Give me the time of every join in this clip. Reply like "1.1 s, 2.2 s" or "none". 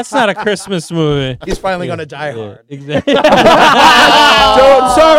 1.4 s